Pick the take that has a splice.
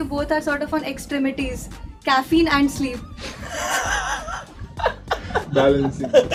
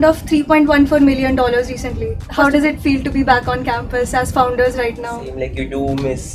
second; 2 cuts; at 2.2 s, 5.3 s

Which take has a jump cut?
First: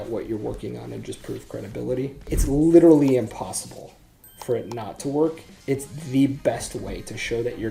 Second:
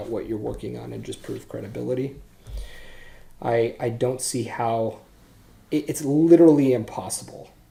first; 2 cuts; at 2.3 s, 5.5 s

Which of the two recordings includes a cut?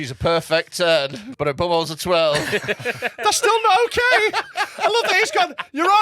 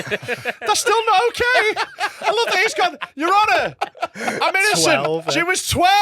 first; 1 cut; at 1.2 s

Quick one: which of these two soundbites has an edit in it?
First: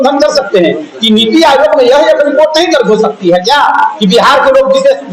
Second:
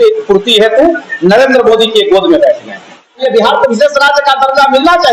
second; 1 cut; at 3.1 s

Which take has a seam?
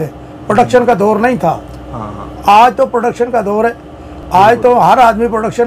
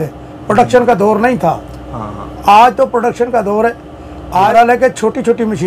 second; 1 cut; at 4.1 s

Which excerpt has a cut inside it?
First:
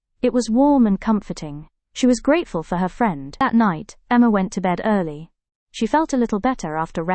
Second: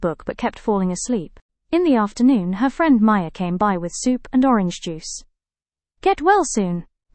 first; 1 cut; at 3.3 s

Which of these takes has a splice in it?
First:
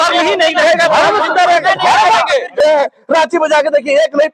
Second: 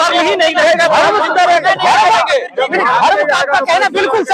first; 1 cut; at 2.6 s

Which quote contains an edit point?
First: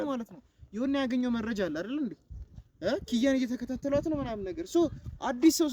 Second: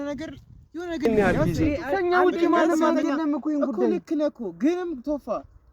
second; 1 cut; at 1.1 s

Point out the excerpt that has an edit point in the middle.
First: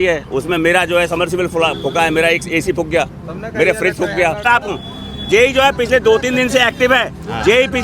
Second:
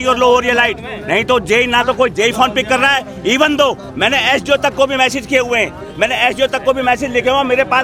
first; 1 cut; at 4.5 s

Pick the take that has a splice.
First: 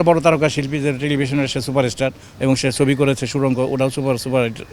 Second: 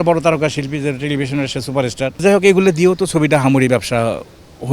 second; 1 cut; at 2.2 s

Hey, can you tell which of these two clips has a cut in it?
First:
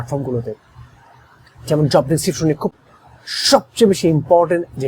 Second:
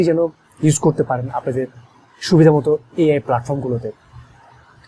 first; 1 cut; at 2.8 s

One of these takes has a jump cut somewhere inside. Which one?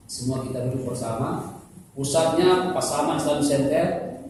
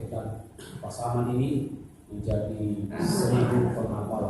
second; 1 cut; at 3.0 s

